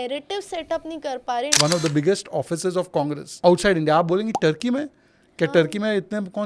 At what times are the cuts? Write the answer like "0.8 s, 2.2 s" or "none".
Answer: 1.5 s, 3.2 s